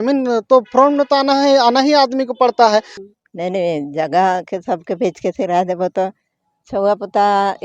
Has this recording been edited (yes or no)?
yes